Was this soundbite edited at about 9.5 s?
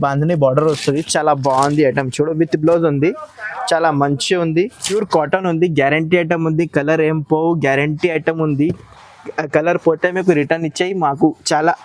no; 1 cut; at 4.9 s

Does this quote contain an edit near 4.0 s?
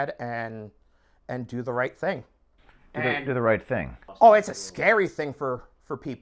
no; 1 cut; at 2.3 s

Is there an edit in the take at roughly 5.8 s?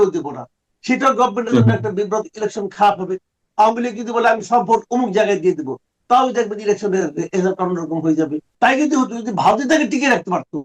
no; 1 cut; at 8.4 s

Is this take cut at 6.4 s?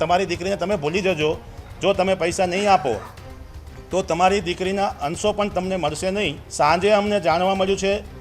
yes; 1 cut; at 6.4 s

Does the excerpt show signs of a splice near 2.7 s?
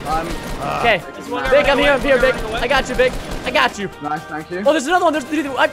no; 0 cuts

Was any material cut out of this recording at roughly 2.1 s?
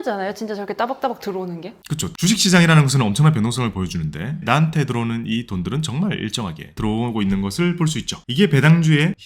yes; 2 cuts; at 2.1 s, 6.8 s

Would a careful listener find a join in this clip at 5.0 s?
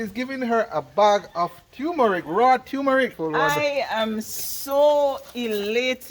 no; 1 cut; at 3.2 s

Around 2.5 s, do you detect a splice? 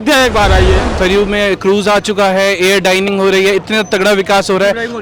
no; 1 cut; at 0.9 s

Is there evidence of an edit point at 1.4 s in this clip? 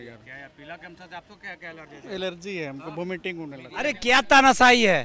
no; 1 cut; at 4.0 s

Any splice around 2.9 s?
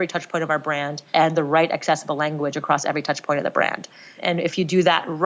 no; 2 cuts; at 1.0 s, 4.2 s

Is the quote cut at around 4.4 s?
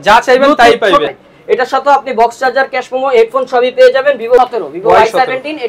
yes; 2 cuts; at 1.2 s, 4.4 s

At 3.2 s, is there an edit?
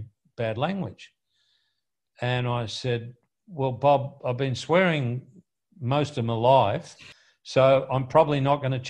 no; 1 cut; at 7.1 s

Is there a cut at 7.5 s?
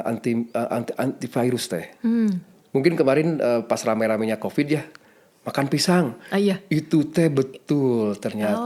no; 0 cuts

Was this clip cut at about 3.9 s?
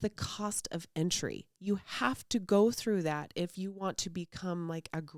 no; 0 cuts

